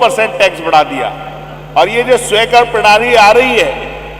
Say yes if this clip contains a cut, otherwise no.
no